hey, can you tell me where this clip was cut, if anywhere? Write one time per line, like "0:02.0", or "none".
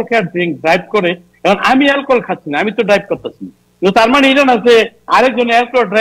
none